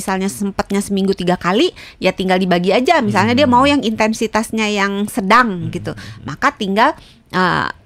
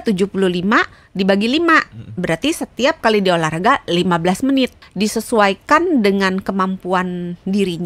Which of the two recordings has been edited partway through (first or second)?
second